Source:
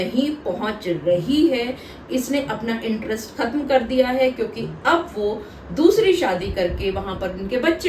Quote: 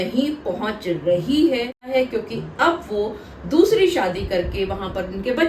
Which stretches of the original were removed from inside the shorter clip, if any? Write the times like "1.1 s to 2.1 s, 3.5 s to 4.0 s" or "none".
1.9 s to 4.1 s